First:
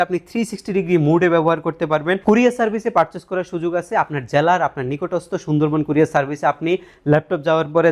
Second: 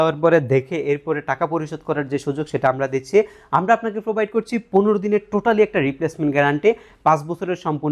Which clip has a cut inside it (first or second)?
first